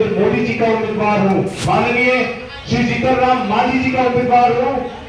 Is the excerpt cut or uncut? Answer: cut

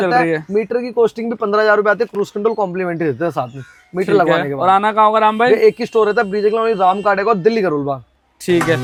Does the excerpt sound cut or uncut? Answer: uncut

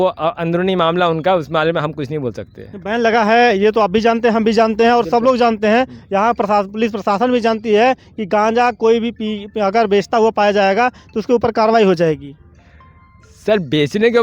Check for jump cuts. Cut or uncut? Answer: uncut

